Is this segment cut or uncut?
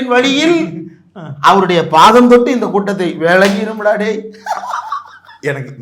uncut